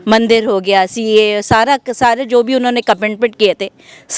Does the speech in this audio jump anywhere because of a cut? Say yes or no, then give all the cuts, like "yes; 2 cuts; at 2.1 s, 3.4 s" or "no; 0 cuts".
no; 0 cuts